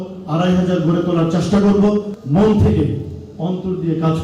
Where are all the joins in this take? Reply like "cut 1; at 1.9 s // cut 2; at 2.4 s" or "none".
cut 1; at 2.2 s